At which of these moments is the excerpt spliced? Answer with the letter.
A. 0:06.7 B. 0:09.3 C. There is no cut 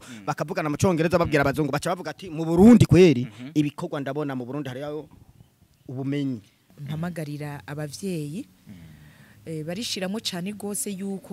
A